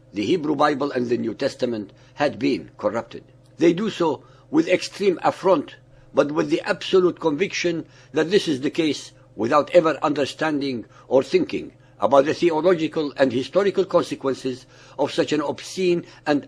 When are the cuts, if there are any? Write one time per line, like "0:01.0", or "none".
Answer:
0:08.4